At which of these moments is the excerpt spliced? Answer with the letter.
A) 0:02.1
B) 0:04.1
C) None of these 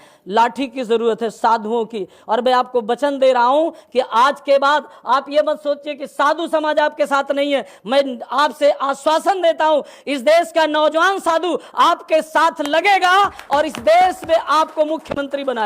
C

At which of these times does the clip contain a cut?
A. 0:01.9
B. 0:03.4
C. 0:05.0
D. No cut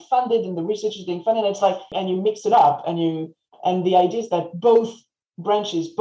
A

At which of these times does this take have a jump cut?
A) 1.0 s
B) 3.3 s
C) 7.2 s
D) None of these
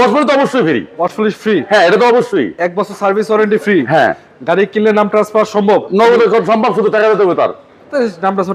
D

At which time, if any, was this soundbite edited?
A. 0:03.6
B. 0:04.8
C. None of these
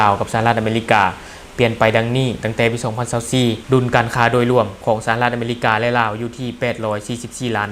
A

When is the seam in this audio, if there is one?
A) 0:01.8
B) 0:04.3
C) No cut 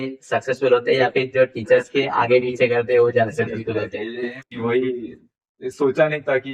B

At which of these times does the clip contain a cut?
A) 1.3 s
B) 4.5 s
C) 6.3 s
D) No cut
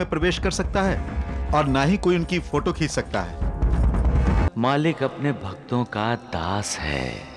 B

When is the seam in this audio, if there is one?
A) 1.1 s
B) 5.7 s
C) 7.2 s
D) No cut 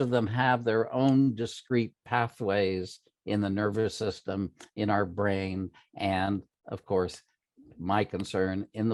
D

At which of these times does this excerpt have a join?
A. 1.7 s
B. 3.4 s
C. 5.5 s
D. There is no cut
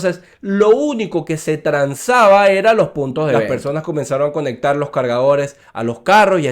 B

